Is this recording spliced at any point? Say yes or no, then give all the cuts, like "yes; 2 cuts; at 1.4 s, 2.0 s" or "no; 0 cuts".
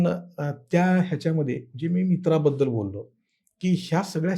no; 0 cuts